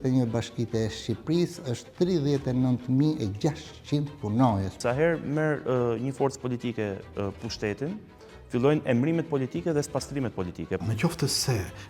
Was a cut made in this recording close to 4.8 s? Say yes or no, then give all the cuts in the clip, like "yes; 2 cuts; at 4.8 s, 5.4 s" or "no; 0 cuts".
yes; 2 cuts; at 4.8 s, 10.8 s